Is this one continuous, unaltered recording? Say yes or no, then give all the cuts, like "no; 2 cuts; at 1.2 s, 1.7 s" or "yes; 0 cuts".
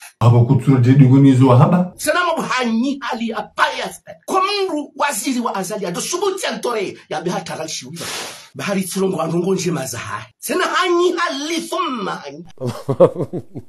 yes; 0 cuts